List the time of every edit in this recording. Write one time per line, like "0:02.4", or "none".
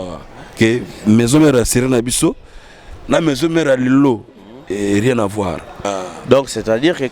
0:05.8